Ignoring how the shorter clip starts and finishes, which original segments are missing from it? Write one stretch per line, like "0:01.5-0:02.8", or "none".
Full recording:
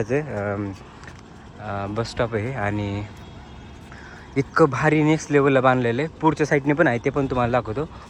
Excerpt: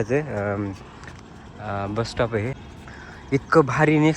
0:02.5-0:03.6